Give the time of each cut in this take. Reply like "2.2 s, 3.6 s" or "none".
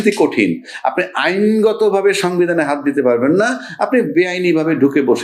none

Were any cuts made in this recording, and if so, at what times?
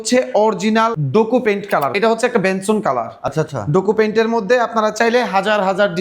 1.0 s, 1.9 s

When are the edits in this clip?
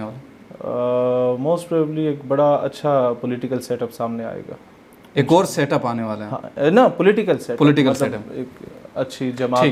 none

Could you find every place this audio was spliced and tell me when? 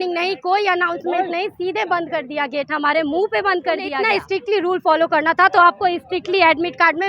4.0 s

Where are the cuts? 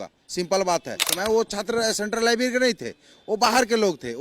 1.1 s

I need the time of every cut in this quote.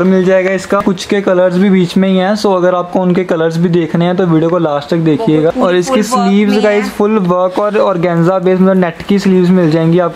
0.8 s, 5.5 s

